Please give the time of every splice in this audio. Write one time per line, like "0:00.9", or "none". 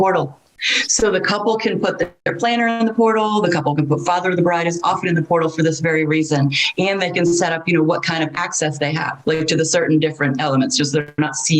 none